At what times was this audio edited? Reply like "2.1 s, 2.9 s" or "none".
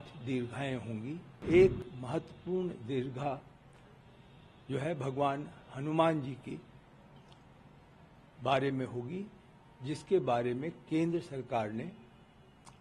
1.3 s

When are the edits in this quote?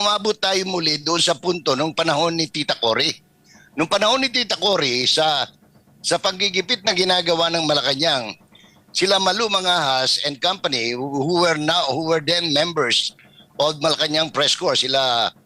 none

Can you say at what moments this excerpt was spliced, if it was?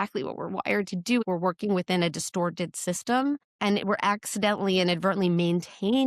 1.2 s, 3.5 s

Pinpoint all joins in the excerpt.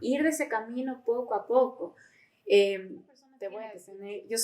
3.3 s

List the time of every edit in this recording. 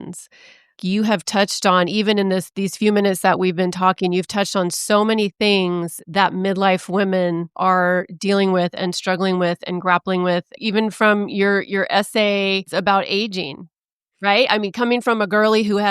7.5 s, 10.5 s, 12.7 s

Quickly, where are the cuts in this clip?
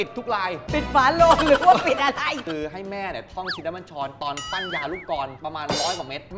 2.4 s, 5.4 s

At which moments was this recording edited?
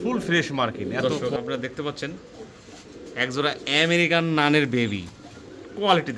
1.0 s

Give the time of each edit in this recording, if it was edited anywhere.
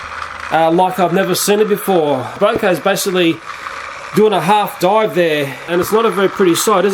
2.4 s, 5.7 s

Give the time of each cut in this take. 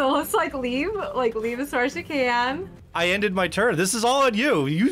2.8 s

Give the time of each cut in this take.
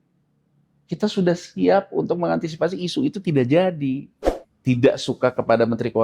4.2 s

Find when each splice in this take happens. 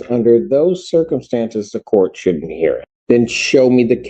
2.9 s

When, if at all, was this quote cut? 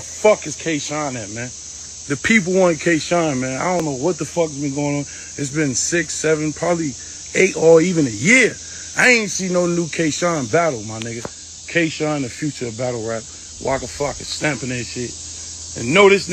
1.2 s

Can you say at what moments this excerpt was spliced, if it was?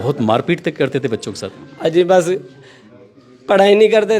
none

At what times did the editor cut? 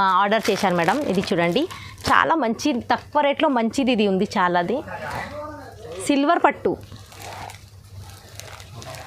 none

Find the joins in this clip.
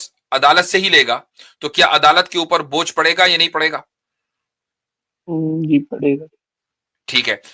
none

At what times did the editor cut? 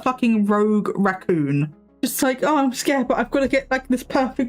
1.8 s

